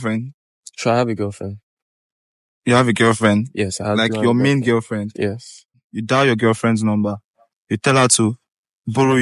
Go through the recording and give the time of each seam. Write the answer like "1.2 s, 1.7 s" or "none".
5.8 s